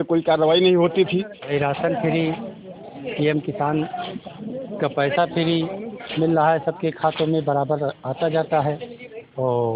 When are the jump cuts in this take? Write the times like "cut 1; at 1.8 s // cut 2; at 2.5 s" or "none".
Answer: cut 1; at 1.4 s